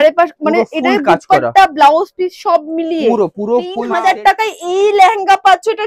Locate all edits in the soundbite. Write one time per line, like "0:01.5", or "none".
0:03.8